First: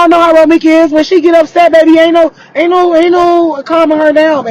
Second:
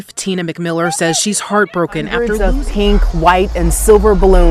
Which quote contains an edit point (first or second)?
second